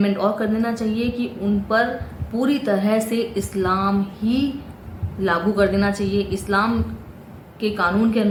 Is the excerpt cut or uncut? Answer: uncut